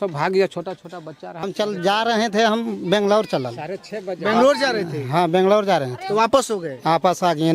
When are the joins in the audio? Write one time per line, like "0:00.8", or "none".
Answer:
0:01.4